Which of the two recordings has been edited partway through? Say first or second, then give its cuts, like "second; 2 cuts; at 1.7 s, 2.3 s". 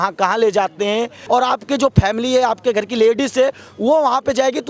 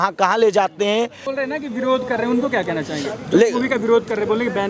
first; 1 cut; at 1.2 s